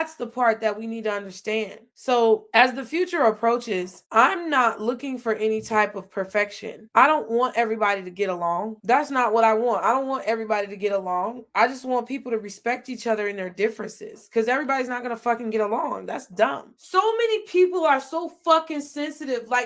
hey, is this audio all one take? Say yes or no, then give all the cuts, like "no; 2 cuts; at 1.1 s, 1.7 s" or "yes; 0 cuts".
no; 2 cuts; at 1.8 s, 16.6 s